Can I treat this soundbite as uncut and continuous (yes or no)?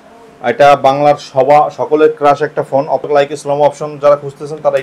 no